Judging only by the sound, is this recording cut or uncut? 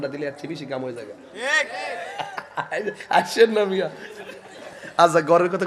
uncut